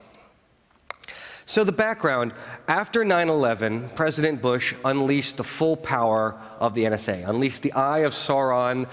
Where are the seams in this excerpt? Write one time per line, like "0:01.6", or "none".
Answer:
0:02.9